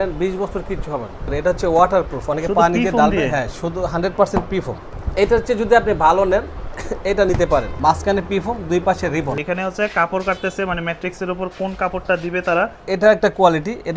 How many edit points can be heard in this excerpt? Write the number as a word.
five